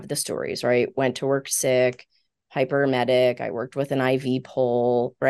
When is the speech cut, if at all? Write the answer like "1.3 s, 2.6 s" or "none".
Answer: none